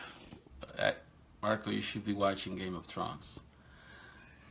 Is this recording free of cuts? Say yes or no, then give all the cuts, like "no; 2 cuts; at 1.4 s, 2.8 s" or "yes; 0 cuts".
yes; 0 cuts